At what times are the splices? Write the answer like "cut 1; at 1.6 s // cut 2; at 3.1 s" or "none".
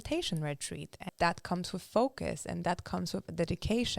cut 1; at 1.1 s